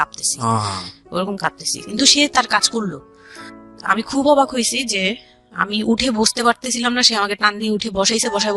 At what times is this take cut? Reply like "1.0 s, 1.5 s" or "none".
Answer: none